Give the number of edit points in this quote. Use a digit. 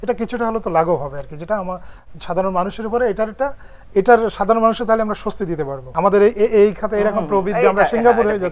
1